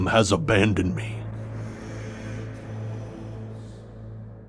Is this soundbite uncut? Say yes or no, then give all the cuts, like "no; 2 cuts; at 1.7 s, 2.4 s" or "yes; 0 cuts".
no; 1 cut; at 1.0 s